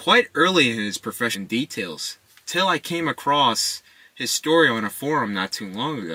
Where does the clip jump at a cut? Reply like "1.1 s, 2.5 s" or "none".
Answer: none